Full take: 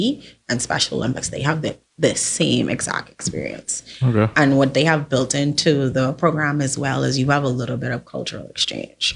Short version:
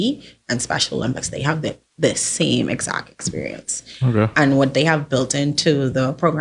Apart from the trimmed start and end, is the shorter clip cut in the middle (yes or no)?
no